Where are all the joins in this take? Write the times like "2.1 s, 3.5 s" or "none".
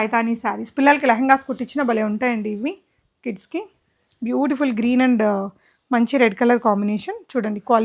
none